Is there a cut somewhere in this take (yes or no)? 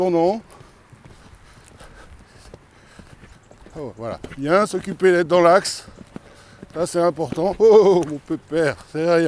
yes